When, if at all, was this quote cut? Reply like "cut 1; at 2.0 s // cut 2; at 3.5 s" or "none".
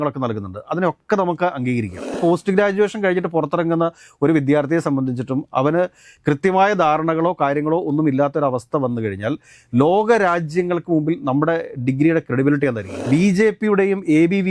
cut 1; at 2.2 s // cut 2; at 12.9 s